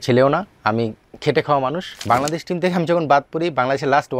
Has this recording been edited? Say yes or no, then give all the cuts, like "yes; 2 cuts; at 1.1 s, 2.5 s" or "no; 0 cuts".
yes; 1 cut; at 1.9 s